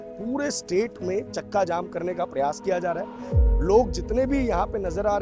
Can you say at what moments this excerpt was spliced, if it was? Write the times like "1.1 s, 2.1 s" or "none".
3.3 s